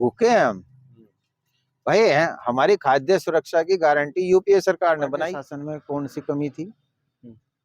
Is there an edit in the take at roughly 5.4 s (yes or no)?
yes